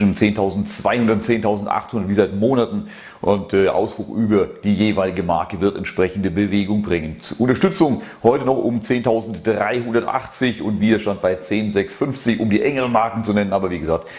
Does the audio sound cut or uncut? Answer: cut